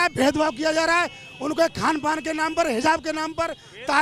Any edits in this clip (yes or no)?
no